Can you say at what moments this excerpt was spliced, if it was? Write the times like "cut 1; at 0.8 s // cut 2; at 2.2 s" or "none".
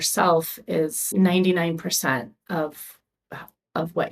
cut 1; at 1.1 s